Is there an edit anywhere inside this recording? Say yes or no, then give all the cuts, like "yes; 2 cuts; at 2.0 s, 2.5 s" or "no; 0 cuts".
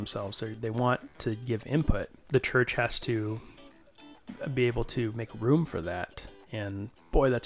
yes; 1 cut; at 2.2 s